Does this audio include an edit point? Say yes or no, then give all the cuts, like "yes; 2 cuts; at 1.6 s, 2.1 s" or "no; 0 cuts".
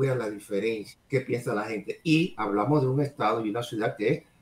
yes; 1 cut; at 0.9 s